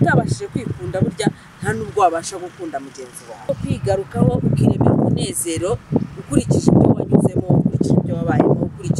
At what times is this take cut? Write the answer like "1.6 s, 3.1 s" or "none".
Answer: 3.5 s